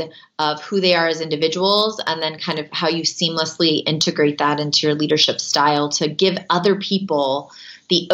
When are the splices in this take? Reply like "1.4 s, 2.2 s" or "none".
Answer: none